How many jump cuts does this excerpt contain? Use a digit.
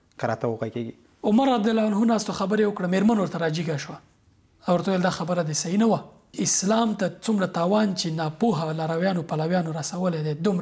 2